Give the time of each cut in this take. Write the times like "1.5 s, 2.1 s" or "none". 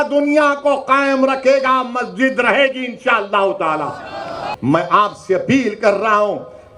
4.5 s